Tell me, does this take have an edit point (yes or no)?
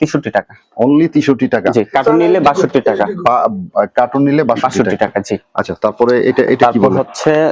no